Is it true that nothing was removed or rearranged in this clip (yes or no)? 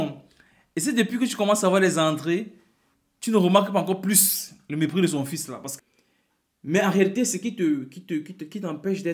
no